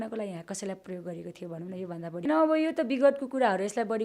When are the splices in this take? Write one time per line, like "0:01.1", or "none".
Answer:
0:02.3